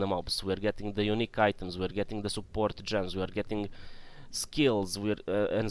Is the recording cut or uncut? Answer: uncut